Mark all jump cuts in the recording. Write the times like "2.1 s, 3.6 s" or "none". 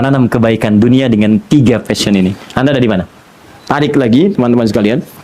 3.5 s